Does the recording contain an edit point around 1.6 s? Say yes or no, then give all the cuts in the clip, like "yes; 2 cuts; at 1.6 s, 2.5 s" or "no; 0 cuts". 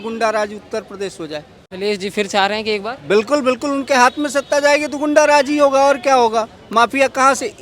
yes; 1 cut; at 1.6 s